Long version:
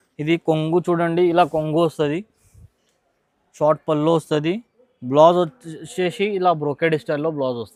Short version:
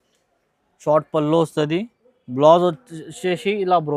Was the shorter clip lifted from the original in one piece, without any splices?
yes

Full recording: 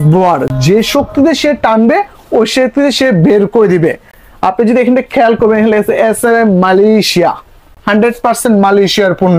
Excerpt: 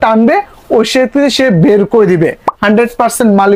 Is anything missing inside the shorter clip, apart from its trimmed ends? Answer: yes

